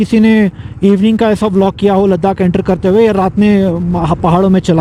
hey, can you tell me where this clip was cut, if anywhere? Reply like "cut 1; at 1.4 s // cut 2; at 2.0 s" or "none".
none